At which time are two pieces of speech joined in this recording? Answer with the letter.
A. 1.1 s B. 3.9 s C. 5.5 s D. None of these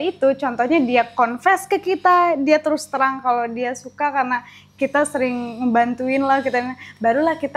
D